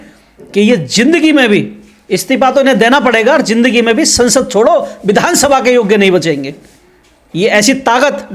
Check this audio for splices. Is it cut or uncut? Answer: uncut